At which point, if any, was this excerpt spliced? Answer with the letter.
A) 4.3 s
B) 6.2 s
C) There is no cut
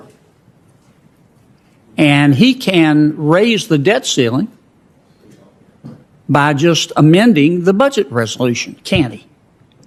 C